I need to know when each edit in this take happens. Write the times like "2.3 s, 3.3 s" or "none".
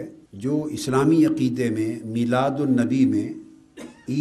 none